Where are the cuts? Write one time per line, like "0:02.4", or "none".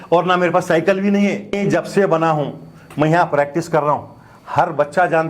0:01.6